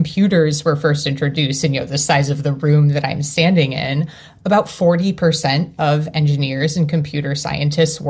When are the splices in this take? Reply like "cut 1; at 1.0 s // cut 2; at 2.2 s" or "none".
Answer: none